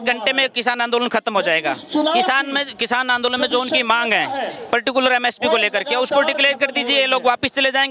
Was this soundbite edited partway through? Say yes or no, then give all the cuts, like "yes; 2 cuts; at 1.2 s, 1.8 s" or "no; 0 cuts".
no; 0 cuts